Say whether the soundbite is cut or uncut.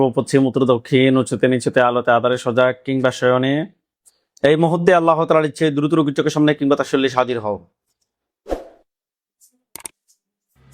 uncut